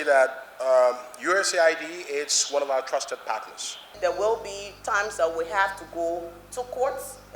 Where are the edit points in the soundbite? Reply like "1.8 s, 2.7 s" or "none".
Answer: 3.9 s